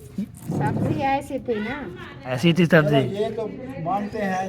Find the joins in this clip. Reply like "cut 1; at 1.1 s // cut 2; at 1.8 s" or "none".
cut 1; at 2.3 s